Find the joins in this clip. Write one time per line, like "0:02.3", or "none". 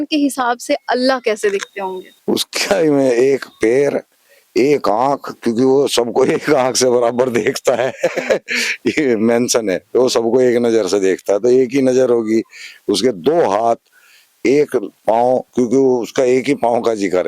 0:02.0

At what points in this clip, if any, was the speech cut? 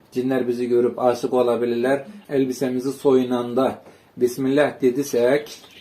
0:02.2

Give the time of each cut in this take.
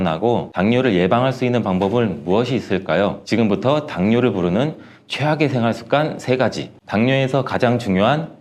none

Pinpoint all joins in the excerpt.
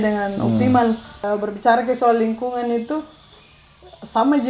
0:01.2

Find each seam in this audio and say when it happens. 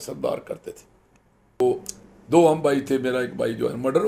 0:01.6

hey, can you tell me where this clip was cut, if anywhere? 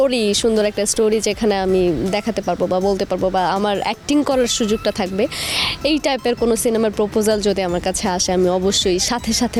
none

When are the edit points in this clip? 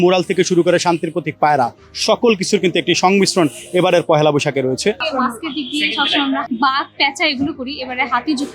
0:05.0
0:06.4

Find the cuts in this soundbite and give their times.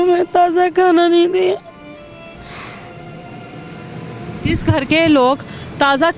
none

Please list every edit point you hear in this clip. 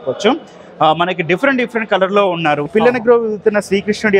0:02.7

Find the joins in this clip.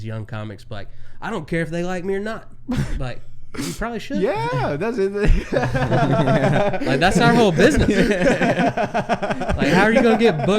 none

